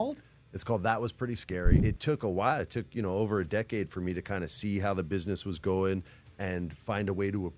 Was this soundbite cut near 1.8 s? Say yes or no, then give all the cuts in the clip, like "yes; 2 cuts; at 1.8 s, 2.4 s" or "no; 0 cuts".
yes; 1 cut; at 1.8 s